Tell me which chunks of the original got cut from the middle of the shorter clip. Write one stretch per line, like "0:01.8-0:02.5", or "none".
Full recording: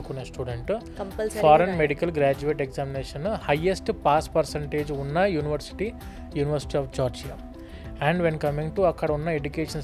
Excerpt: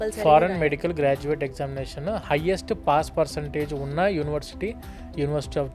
none